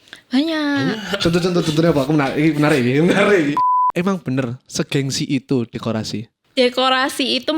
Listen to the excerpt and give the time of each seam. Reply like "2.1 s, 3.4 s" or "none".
3.7 s